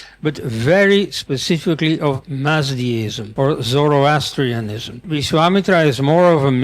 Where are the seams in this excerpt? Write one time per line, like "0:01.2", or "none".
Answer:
0:03.2
0:05.1

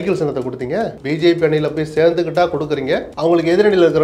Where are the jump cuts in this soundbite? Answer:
0:01.0
0:03.1

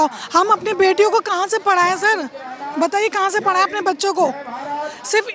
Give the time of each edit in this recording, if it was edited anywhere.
none

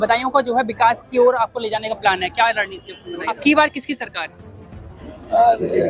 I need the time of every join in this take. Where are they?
0:03.3

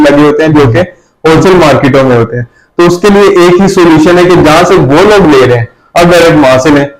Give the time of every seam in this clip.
none

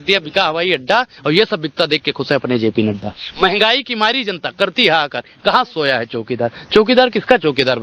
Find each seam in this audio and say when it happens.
none

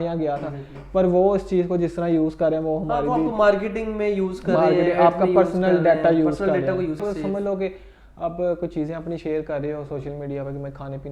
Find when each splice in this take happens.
0:07.0

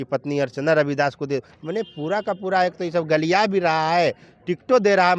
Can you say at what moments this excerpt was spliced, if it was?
none

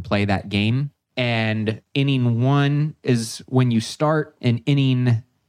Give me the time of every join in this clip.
0:01.0
0:01.8
0:04.3

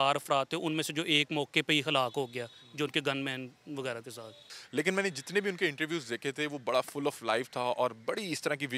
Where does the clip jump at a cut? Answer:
0:04.5

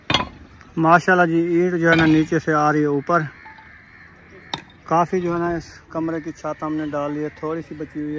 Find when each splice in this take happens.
none

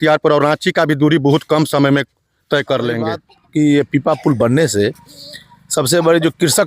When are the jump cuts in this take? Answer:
0:03.3

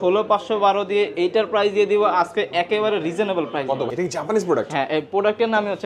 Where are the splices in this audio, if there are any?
0:03.9

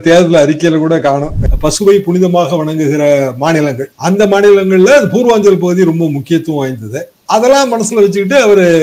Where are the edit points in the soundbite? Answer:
0:01.5

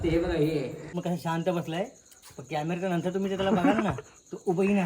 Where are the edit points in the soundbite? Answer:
0:01.0

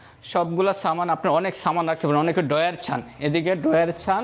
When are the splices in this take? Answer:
none

